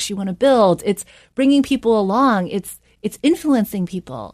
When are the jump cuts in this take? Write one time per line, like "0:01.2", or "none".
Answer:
none